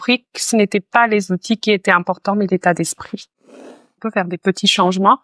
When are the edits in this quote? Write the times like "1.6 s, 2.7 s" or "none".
3.4 s